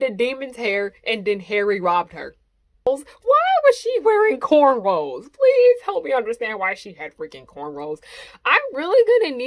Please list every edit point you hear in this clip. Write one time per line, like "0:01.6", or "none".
0:02.9
0:08.3